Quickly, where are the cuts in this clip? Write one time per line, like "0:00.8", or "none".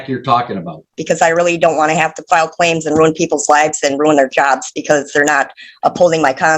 0:01.0

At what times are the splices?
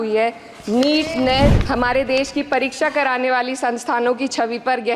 0:01.6

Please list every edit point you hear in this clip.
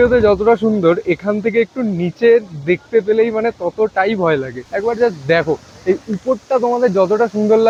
none

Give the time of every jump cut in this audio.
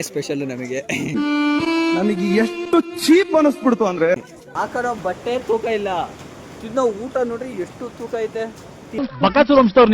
0:04.4

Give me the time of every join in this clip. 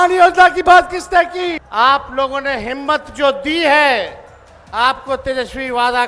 0:01.6

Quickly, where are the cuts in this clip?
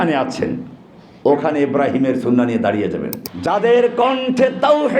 0:03.1

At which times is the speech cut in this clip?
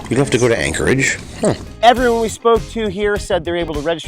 0:01.7

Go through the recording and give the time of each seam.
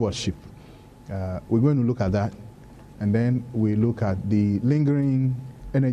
none

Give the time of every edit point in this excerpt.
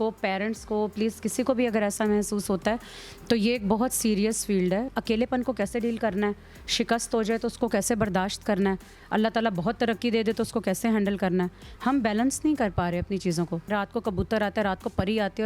0:04.9
0:13.7

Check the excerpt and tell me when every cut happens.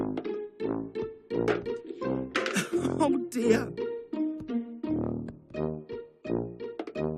0:04.8

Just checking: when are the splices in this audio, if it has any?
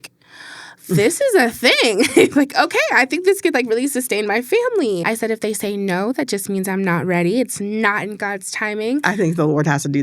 0:05.0
0:09.0

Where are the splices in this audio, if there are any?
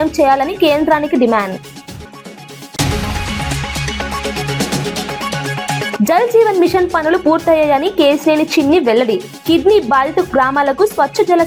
none

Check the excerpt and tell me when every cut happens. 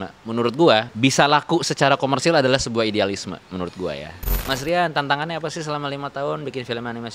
0:00.9
0:04.3

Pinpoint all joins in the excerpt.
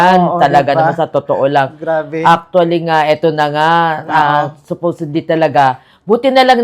none

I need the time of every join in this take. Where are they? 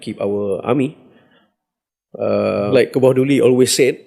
0:02.7

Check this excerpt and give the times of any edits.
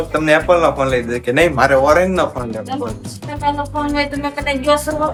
none

